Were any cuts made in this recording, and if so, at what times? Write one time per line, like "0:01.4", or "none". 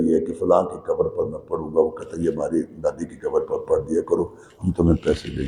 none